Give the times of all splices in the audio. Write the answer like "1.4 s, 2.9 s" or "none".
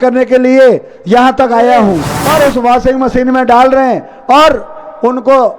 2.1 s